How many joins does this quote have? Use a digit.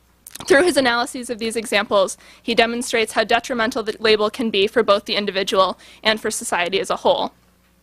1